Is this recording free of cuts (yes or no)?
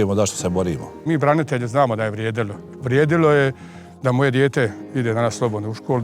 no